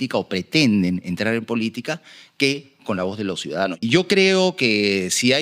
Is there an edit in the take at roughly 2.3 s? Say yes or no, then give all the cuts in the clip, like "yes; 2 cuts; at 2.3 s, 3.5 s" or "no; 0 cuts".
no; 1 cut; at 3.7 s